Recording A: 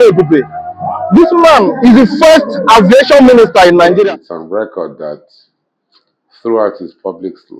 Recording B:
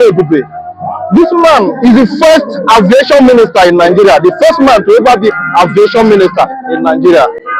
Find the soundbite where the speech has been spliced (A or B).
A